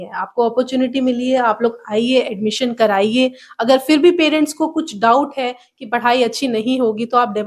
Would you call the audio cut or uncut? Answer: uncut